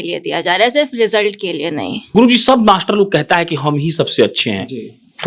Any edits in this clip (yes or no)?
yes